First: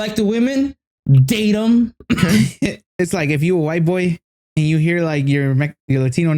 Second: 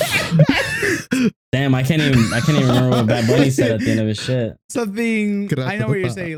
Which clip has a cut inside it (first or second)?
first